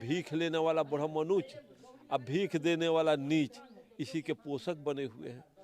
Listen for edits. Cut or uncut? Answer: uncut